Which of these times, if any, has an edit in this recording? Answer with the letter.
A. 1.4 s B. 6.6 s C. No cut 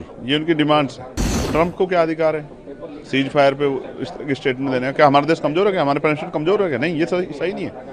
A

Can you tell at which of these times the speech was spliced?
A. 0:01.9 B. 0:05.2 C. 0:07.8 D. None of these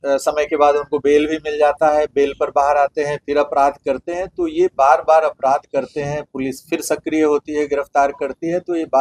D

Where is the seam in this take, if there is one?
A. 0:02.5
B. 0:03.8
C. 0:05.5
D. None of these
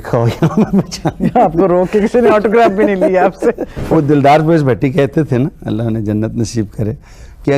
B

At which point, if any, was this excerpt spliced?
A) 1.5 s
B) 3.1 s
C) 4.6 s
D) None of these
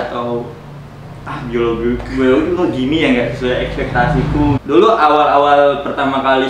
C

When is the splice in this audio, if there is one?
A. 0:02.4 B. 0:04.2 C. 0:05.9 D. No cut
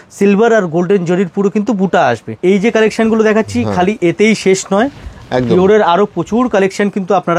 A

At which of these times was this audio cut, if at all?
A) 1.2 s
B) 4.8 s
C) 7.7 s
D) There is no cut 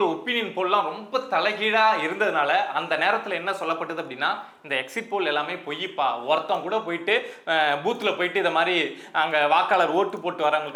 D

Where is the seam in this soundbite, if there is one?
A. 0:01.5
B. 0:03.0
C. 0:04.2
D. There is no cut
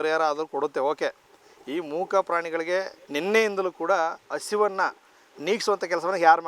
B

